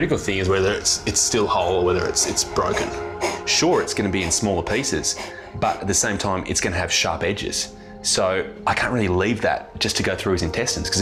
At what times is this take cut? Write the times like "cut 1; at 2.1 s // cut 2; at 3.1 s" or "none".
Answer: none